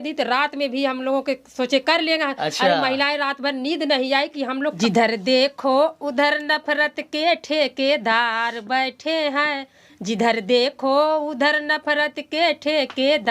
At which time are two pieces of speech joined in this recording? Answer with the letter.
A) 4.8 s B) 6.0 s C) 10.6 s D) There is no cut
A